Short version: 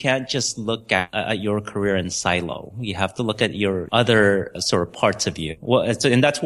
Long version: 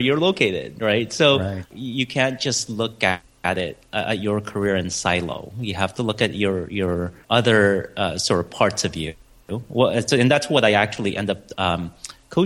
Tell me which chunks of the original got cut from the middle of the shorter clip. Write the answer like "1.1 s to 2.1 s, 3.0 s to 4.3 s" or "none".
3.2 s to 3.9 s, 6.6 s to 7.2 s, 7.9 s to 8.1 s, 9.1 s to 9.6 s